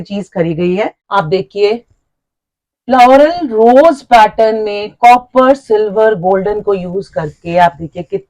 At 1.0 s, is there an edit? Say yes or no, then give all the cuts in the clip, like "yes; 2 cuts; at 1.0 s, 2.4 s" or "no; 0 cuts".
yes; 1 cut; at 1.0 s